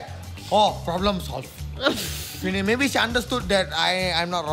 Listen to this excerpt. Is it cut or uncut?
uncut